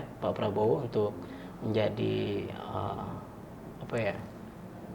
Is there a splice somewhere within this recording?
no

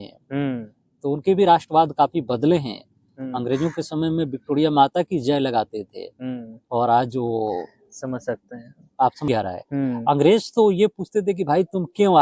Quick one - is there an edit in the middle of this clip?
yes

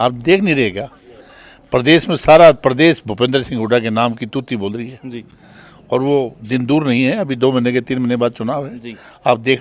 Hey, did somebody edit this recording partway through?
no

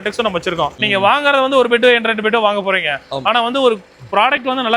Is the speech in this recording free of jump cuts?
yes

